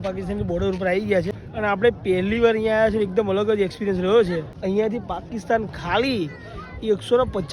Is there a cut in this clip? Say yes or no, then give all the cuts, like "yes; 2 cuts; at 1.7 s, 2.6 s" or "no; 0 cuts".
yes; 2 cuts; at 1.4 s, 4.5 s